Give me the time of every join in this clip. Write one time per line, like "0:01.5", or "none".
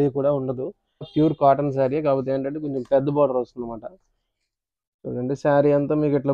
0:01.1